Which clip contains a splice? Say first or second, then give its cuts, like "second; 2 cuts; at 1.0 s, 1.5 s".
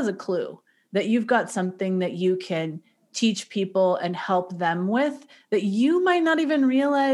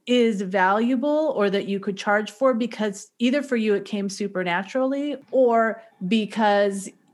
second; 1 cut; at 5.2 s